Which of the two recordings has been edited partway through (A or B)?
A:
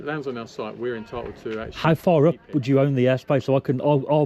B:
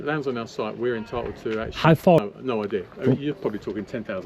B